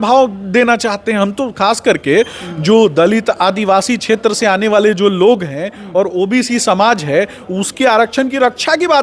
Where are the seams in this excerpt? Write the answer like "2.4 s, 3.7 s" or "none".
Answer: none